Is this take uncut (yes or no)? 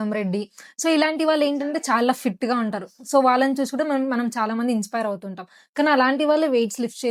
yes